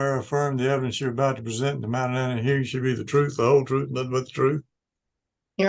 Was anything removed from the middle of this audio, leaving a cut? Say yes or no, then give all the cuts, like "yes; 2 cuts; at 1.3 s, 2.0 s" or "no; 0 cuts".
no; 0 cuts